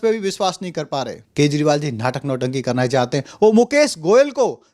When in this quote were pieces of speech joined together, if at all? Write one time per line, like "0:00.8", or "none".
0:01.2